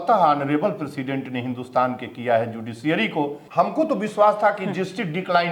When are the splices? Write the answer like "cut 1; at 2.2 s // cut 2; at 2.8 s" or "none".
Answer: cut 1; at 3.4 s